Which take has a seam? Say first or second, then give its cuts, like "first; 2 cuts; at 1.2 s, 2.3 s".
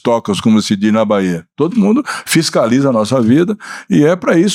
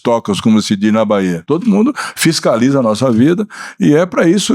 second; 1 cut; at 1.4 s